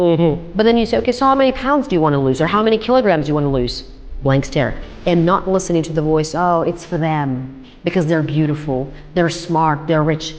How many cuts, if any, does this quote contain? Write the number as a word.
one